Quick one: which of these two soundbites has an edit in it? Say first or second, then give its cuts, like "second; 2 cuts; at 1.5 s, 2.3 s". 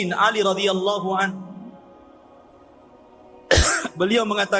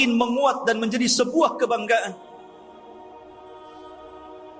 first; 2 cuts; at 2.1 s, 3.5 s